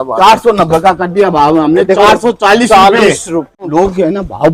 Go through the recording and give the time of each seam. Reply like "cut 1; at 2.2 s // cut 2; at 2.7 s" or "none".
cut 1; at 3.6 s